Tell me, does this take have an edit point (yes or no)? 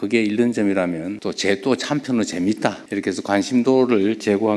yes